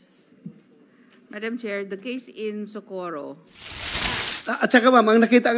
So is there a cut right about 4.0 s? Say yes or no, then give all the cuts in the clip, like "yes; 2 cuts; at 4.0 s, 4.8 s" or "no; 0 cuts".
yes; 1 cut; at 4.0 s